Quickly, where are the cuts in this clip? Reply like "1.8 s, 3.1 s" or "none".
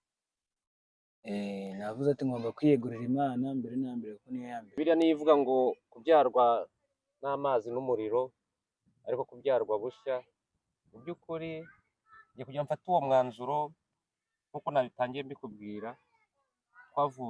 4.7 s